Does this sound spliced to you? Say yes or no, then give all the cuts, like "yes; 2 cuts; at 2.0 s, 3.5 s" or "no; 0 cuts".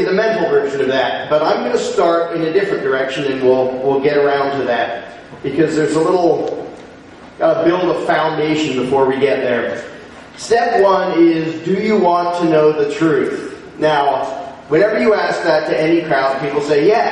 yes; 1 cut; at 5.2 s